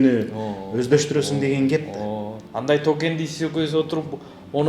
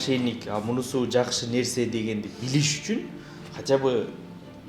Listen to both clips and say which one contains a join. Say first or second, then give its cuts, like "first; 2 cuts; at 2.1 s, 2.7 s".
first; 1 cut; at 2.4 s